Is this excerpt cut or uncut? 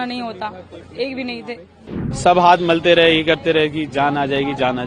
cut